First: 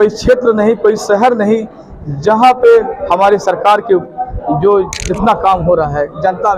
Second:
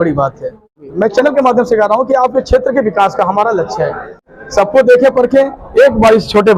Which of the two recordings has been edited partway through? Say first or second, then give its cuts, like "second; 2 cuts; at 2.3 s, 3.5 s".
second; 2 cuts; at 0.9 s, 4.2 s